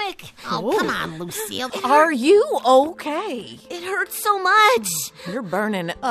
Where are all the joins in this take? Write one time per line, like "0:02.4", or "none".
0:01.7